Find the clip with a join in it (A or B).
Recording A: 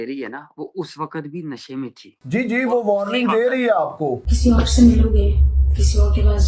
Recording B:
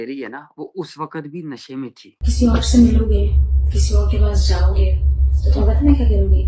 B